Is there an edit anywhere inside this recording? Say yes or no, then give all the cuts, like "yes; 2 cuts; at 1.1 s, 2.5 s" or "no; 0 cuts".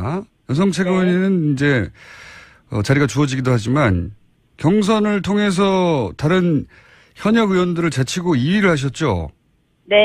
yes; 1 cut; at 2.0 s